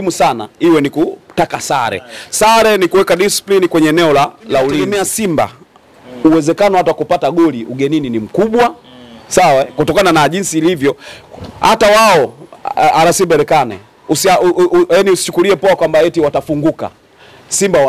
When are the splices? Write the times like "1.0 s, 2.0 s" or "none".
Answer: 5.0 s